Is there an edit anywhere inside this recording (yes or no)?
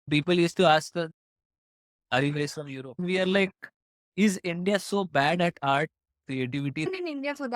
yes